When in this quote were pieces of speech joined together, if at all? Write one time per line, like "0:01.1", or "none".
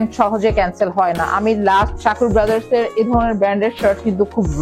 0:01.9